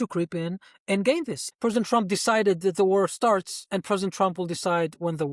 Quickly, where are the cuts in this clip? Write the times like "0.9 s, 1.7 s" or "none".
1.4 s